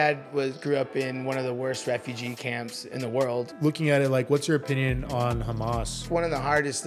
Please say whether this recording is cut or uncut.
cut